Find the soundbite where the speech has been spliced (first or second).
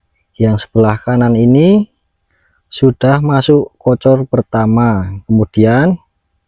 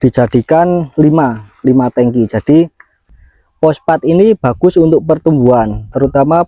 second